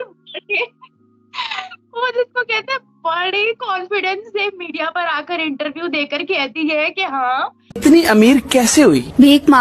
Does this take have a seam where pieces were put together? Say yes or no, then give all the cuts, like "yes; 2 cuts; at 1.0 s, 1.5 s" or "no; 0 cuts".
yes; 1 cut; at 7.8 s